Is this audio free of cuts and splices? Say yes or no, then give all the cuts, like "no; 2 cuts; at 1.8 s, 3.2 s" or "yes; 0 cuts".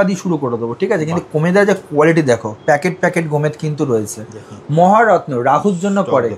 yes; 0 cuts